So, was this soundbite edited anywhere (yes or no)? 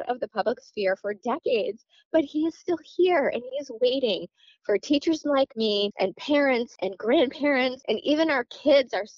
yes